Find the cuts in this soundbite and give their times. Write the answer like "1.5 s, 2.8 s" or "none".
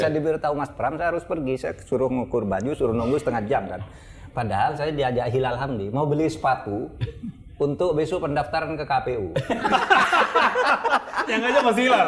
none